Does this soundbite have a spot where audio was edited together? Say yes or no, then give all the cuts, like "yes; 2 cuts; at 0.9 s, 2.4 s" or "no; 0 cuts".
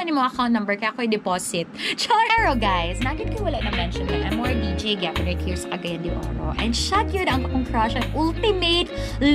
yes; 1 cut; at 2.3 s